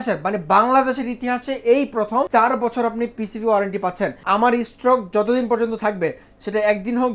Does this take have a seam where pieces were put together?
yes; 2 cuts; at 2.3 s, 4.2 s

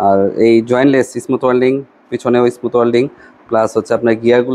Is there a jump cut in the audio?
no; 0 cuts

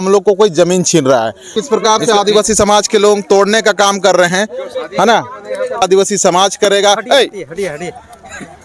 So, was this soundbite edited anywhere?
yes; 2 cuts; at 1.5 s, 5.8 s

